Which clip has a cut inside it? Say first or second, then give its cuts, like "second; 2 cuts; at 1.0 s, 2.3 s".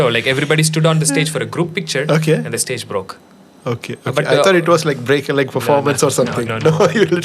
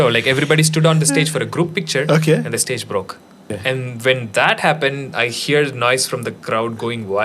second; 1 cut; at 3.5 s